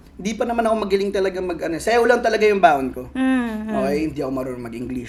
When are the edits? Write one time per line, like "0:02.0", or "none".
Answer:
none